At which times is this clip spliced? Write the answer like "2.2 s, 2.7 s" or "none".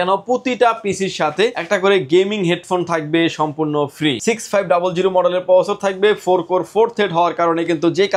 1.6 s, 4.2 s